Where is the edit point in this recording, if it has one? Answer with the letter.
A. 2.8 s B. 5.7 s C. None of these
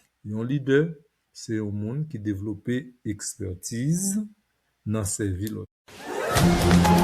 B